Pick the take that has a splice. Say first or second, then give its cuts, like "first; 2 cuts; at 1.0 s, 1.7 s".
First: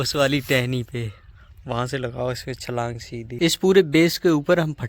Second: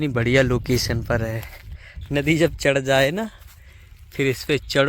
first; 1 cut; at 3.4 s